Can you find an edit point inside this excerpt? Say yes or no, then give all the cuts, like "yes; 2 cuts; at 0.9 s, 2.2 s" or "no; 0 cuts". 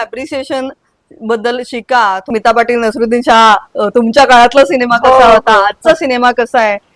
yes; 1 cut; at 2.2 s